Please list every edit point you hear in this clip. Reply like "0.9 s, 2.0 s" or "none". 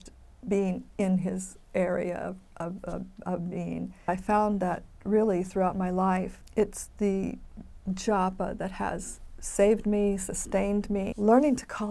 4.1 s, 6.4 s, 11.1 s